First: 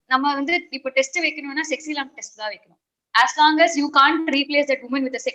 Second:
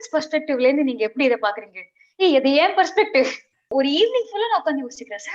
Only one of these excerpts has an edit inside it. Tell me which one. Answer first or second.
second